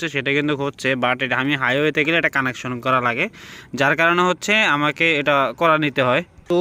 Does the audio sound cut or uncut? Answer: uncut